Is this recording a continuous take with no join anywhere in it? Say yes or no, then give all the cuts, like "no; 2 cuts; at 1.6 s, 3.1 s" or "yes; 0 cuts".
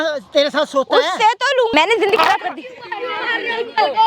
no; 1 cut; at 1.7 s